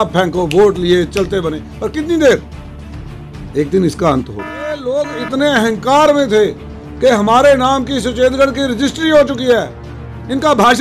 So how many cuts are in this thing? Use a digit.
1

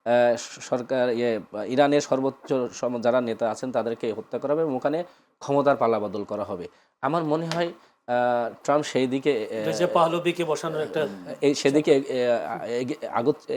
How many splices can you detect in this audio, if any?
0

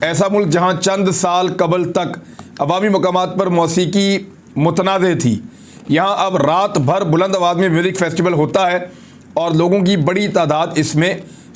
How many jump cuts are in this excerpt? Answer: 0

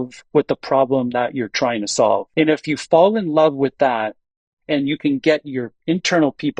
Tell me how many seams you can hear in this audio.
1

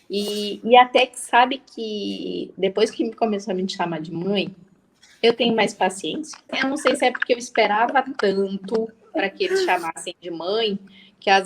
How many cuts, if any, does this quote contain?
1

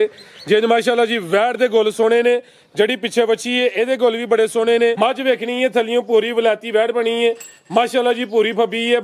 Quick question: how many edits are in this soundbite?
1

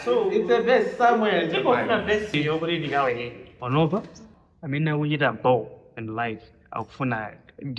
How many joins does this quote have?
1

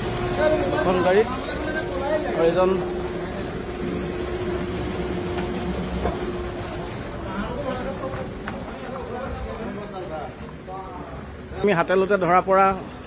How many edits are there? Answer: 1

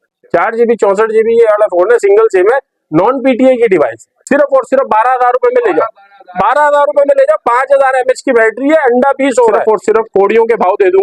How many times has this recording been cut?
2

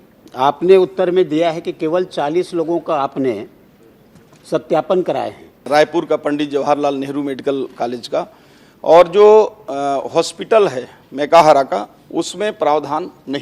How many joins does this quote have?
1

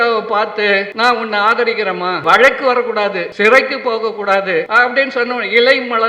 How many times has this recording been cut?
4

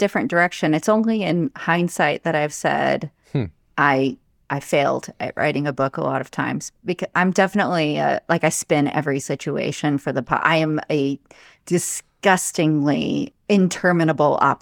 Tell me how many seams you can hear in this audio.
1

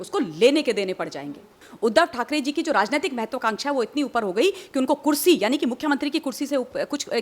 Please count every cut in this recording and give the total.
1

